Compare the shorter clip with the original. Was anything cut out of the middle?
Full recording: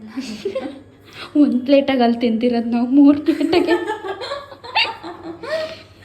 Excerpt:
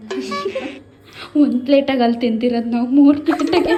no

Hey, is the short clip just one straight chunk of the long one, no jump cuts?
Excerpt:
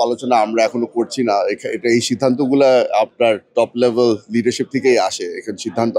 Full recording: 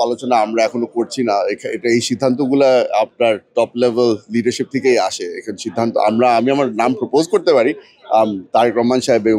yes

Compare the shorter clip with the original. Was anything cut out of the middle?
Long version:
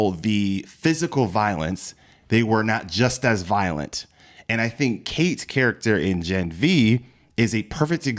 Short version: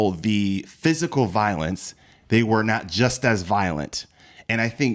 no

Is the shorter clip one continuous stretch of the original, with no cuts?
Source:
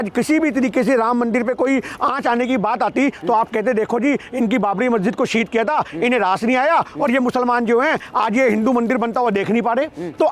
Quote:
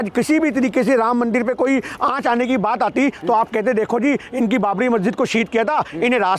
yes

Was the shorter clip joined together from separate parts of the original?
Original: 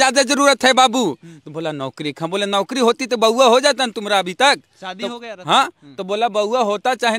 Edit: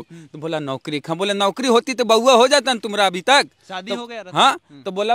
no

